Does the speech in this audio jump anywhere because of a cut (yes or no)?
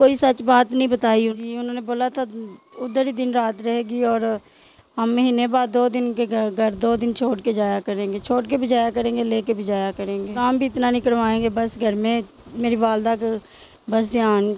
yes